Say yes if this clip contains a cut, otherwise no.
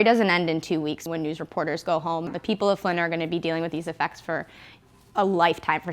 yes